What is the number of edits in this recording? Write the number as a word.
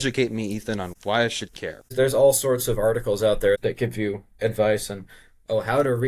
three